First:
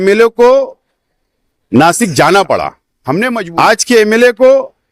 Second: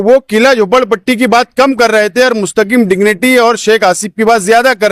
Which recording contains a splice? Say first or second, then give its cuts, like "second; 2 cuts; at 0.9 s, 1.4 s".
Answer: first; 1 cut; at 3.3 s